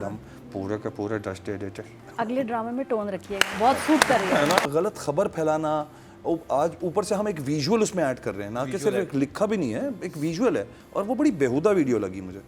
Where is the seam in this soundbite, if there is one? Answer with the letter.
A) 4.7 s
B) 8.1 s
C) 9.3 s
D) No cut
A